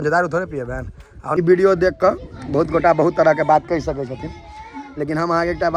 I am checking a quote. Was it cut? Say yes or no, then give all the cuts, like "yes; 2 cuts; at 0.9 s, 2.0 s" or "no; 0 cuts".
yes; 1 cut; at 1.3 s